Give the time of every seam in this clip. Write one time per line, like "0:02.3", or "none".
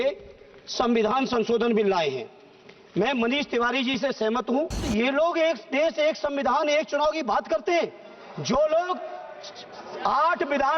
0:04.9